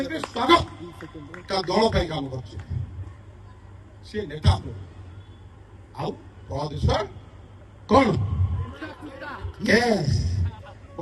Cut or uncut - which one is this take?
uncut